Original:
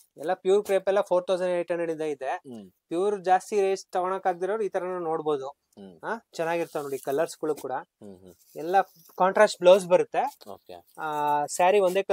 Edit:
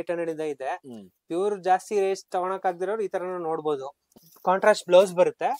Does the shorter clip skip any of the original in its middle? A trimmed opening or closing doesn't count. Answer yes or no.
yes